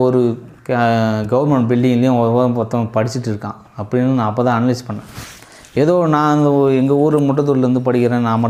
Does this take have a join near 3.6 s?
no; 0 cuts

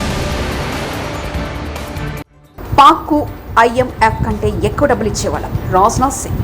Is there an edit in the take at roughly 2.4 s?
yes; 1 cut; at 2.4 s

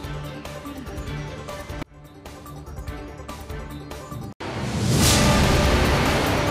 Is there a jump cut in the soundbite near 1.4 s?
no; 1 cut; at 4.3 s

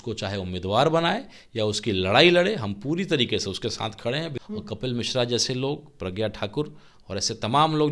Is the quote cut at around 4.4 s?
yes; 1 cut; at 4.4 s

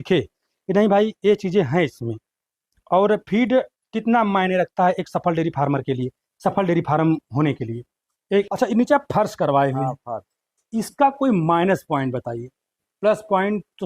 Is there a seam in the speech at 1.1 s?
no; 1 cut; at 8.5 s

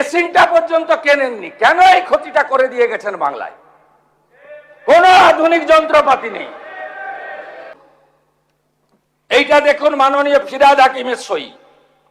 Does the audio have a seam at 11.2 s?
no; 1 cut; at 7.7 s

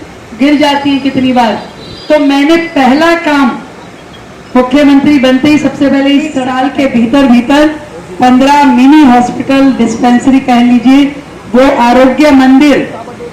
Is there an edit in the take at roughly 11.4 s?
no; 1 cut; at 6.5 s

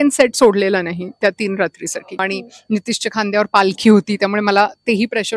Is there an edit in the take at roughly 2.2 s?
yes; 1 cut; at 2.2 s

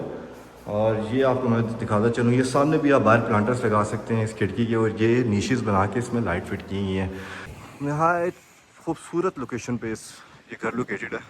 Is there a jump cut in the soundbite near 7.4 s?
yes; 1 cut; at 7.4 s

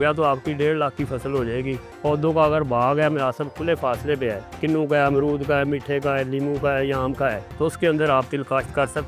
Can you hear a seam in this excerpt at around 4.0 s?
no; 2 cuts; at 1.8 s, 7.5 s

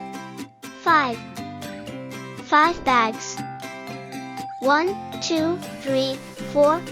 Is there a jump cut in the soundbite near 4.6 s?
yes; 2 cuts; at 3.1 s, 4.6 s

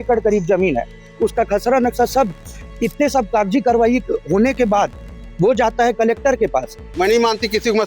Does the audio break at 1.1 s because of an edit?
no; 2 cuts; at 2.6 s, 6.9 s

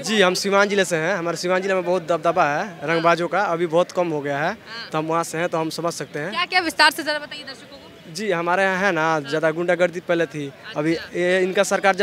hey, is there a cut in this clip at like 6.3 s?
no; 0 cuts

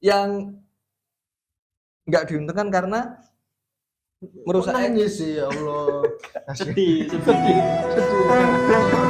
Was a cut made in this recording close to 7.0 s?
no; 0 cuts

